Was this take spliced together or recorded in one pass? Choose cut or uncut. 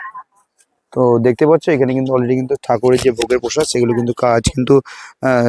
uncut